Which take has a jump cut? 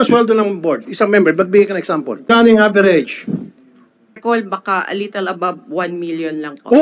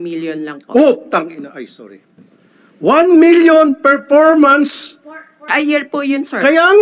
first; 2 cuts; at 2.2 s, 4.2 s

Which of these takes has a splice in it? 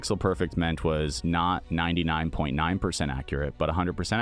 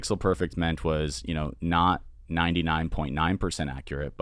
first; 1 cut; at 1.5 s

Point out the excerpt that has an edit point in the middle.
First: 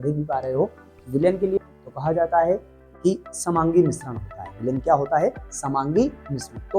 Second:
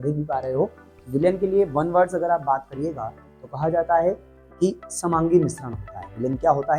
first; 1 cut; at 1.6 s

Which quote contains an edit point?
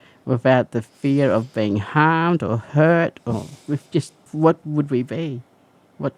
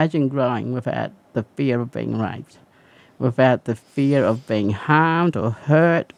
first; 1 cut; at 4.2 s

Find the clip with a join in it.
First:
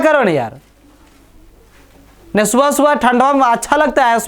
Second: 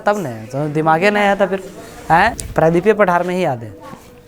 second; 1 cut; at 2.4 s

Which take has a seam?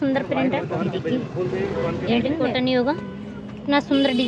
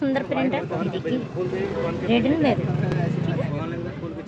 first; 1 cut; at 2.5 s

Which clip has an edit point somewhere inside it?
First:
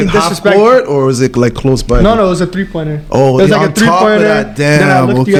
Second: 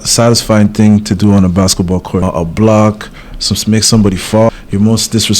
second; 2 cuts; at 2.2 s, 4.5 s

